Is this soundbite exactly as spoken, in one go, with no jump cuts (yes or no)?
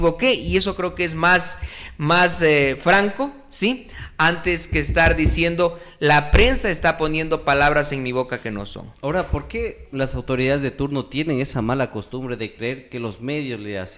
yes